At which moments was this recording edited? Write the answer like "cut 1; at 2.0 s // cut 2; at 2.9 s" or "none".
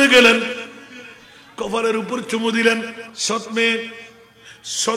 cut 1; at 3.1 s